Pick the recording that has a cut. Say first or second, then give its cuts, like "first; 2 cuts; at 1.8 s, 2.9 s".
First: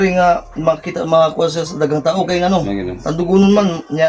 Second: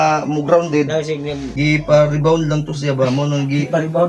second; 1 cut; at 1.5 s